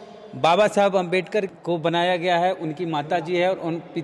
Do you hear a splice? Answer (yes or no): no